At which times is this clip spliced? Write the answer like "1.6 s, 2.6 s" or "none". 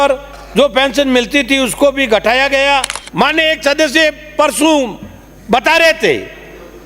3.0 s